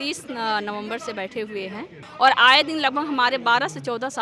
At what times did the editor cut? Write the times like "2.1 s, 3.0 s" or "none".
2.0 s